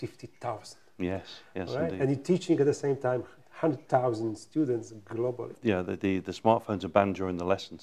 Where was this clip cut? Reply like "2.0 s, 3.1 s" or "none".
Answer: 5.5 s

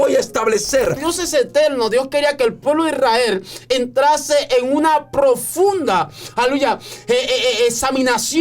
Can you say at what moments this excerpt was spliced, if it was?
1.0 s

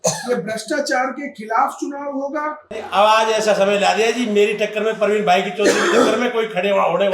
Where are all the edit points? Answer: 2.8 s

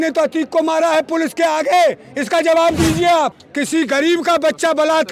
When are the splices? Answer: 3.4 s

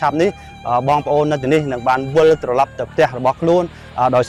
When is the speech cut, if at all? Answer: none

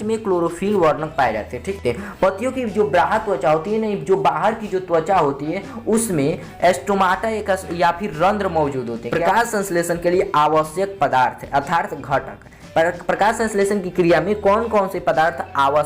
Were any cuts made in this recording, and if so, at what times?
1.8 s, 9.0 s

